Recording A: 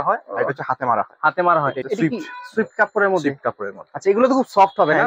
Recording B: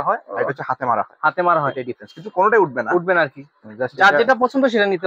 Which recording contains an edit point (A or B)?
A